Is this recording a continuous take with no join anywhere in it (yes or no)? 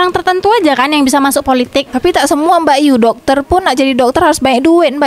yes